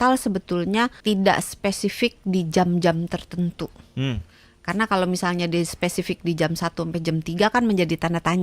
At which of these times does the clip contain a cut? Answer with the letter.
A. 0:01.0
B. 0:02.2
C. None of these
A